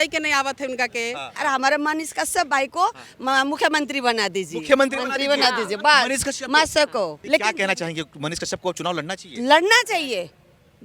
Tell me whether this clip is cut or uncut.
cut